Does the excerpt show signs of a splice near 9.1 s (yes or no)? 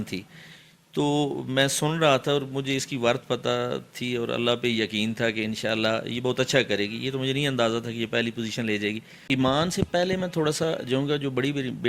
yes